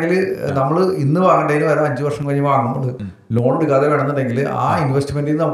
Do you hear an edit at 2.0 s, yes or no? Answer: no